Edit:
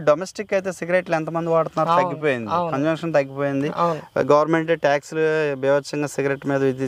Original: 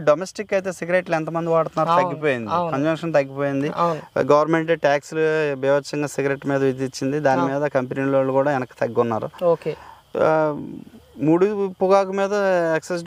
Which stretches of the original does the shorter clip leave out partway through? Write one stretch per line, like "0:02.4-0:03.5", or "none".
none